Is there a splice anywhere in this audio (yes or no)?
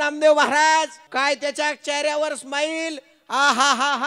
yes